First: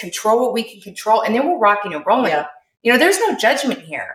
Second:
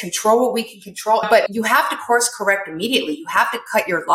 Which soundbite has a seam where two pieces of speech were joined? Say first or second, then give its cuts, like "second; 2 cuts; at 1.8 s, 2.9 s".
second; 1 cut; at 1.2 s